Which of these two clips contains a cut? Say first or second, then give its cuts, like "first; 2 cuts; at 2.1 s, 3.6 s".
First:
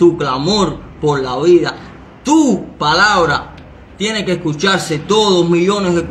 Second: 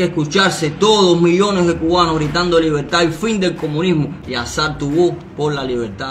second; 1 cut; at 4.2 s